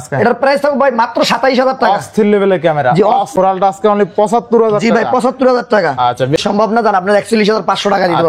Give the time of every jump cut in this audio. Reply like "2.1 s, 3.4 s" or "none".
3.3 s, 6.4 s